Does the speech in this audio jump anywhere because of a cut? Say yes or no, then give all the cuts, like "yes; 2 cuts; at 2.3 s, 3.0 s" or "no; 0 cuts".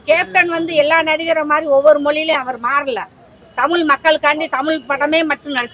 no; 0 cuts